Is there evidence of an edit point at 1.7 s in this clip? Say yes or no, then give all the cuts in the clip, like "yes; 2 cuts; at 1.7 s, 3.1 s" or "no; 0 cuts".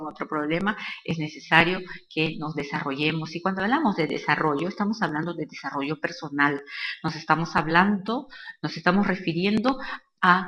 yes; 1 cut; at 1.7 s